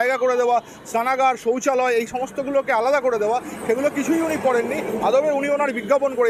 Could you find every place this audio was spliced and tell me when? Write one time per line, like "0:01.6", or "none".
none